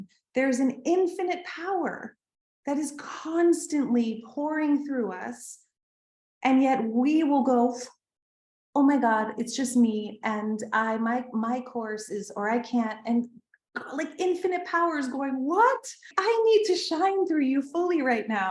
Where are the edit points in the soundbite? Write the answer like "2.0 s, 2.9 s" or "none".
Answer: 16.1 s